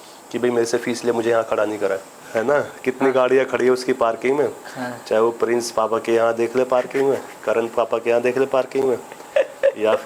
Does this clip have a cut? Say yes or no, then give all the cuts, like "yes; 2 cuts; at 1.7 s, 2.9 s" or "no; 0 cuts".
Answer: yes; 1 cut; at 2.2 s